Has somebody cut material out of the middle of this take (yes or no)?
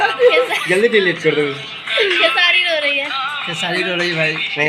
no